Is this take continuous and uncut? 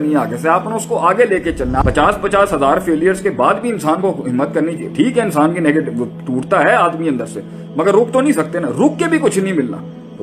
no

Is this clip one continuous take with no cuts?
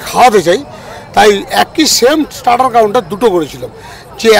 yes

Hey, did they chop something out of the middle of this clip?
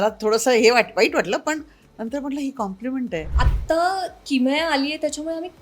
yes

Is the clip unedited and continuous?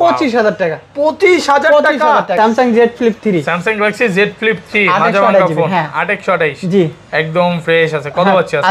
no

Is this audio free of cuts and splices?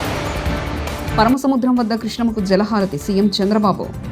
no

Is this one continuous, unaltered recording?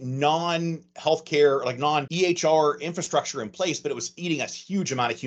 yes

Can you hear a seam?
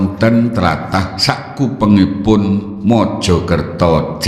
yes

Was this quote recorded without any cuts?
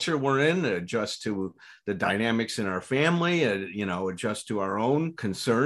yes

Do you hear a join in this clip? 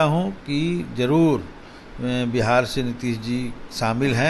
no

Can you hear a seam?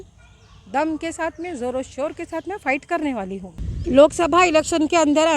yes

